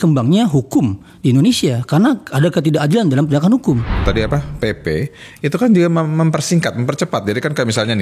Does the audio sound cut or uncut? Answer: cut